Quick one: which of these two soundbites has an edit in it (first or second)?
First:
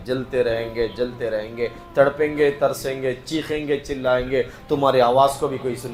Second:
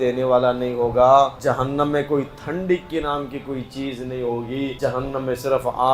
second